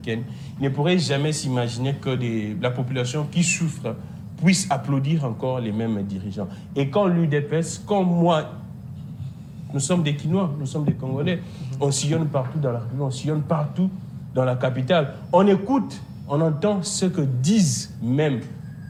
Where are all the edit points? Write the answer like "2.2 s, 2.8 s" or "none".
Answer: none